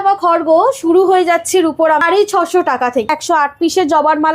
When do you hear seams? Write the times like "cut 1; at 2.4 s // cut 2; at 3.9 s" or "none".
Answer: cut 1; at 2.0 s // cut 2; at 3.1 s